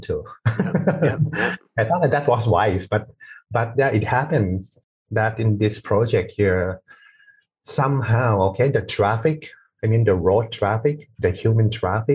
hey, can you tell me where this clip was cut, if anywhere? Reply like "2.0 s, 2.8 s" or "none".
none